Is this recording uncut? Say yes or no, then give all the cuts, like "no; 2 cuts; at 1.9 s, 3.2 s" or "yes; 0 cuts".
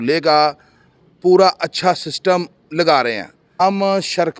no; 1 cut; at 3.5 s